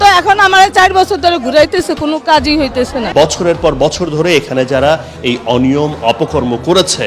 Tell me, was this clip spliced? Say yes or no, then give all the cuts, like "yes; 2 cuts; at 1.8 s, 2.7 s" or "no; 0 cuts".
yes; 1 cut; at 3.1 s